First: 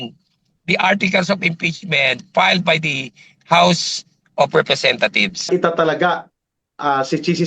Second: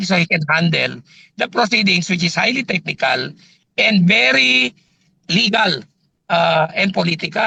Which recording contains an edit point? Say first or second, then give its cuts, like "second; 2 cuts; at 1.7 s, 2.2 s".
first; 1 cut; at 5.5 s